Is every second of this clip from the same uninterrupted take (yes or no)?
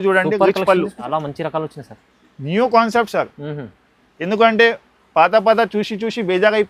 no